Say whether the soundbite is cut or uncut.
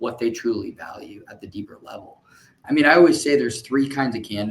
cut